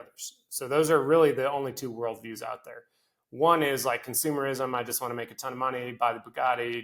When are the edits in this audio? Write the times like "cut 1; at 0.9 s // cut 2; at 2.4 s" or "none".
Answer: none